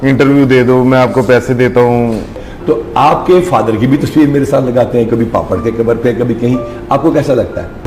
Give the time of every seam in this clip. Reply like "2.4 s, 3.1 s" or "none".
2.4 s